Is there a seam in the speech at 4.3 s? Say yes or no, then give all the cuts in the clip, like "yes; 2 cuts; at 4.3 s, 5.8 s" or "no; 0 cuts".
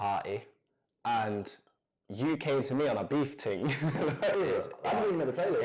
yes; 1 cut; at 4.3 s